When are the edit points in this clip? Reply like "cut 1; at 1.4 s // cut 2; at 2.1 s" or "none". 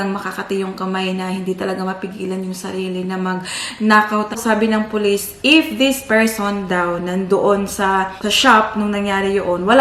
cut 1; at 4.4 s // cut 2; at 8.2 s